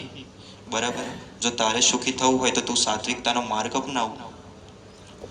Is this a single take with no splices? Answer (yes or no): yes